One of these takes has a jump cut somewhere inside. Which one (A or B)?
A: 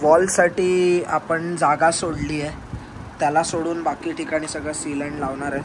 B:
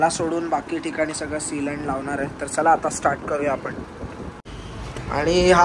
B